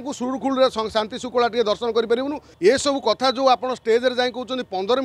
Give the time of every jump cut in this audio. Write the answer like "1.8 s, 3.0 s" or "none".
2.4 s